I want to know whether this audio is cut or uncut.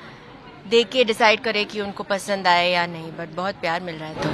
uncut